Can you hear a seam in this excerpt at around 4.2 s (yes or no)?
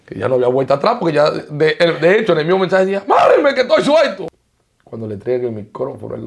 yes